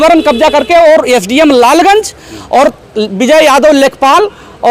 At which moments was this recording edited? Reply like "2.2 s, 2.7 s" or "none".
none